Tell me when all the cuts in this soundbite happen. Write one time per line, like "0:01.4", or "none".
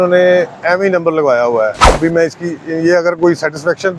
none